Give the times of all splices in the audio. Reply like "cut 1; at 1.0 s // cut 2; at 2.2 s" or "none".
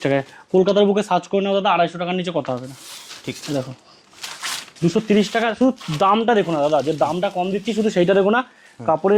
none